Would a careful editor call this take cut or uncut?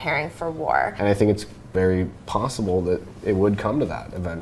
cut